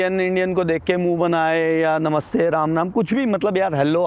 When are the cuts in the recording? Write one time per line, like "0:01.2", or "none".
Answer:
none